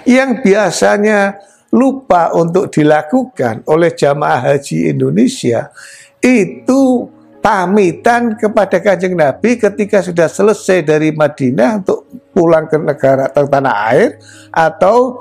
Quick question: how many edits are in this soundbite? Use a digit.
0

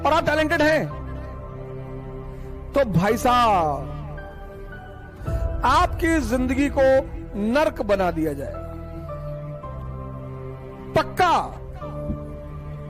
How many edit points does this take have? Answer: 1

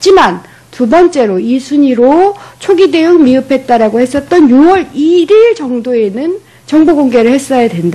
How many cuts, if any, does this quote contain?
1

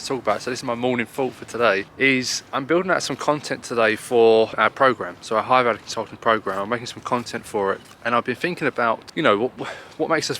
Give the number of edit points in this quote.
4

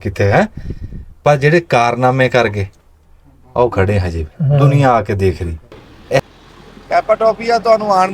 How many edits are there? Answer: 1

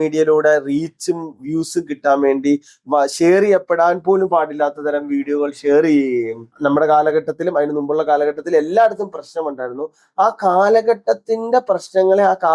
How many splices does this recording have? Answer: 1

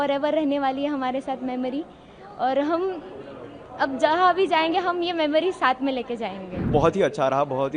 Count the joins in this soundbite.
1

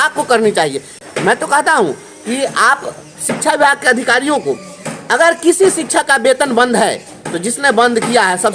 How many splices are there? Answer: 1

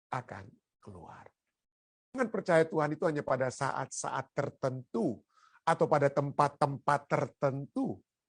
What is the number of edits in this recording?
1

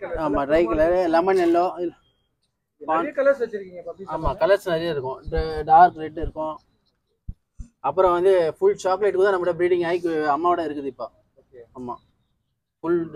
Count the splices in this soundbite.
0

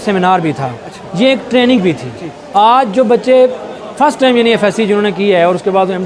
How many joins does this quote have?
0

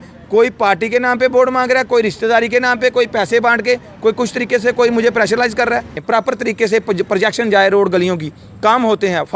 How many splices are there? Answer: 1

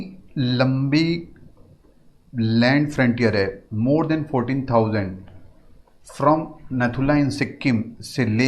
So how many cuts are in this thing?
0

